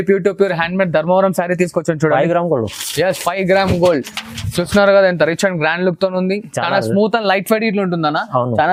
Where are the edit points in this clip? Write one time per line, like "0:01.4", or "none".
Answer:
none